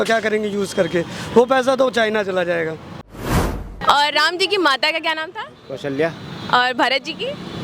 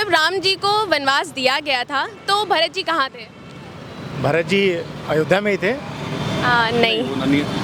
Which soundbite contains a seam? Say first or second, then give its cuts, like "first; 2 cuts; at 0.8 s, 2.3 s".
first; 1 cut; at 3.2 s